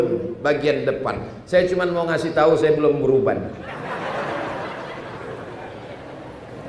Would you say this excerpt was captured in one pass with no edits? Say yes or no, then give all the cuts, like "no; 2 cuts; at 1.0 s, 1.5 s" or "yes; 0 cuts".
yes; 0 cuts